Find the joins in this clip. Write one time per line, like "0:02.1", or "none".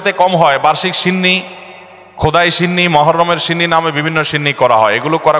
none